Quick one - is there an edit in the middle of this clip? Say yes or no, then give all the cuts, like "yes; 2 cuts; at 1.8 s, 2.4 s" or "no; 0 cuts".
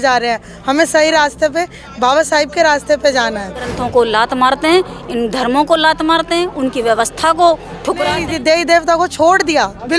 yes; 2 cuts; at 3.8 s, 8.2 s